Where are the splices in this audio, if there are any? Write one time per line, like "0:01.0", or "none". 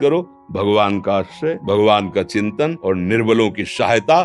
0:01.6
0:02.8